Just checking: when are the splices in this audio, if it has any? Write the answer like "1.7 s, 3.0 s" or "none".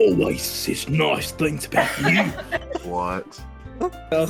none